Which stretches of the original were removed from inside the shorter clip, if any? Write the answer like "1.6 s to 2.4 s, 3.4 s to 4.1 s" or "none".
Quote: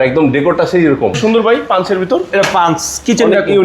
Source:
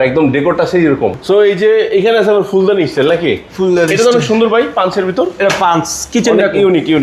1.2 s to 4.2 s